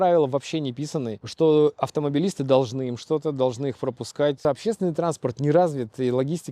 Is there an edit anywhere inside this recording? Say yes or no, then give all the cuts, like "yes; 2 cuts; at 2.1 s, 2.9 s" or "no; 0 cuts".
yes; 2 cuts; at 1.2 s, 4.4 s